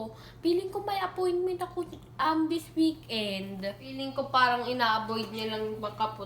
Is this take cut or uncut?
cut